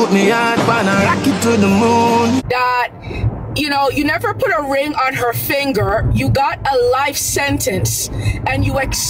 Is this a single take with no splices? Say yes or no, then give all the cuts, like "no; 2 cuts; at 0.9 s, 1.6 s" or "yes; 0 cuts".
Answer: no; 1 cut; at 2.4 s